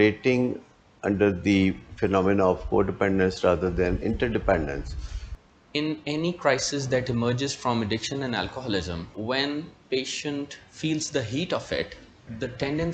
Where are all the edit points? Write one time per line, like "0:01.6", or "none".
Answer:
0:05.5